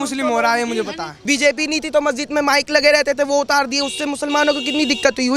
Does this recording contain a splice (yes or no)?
yes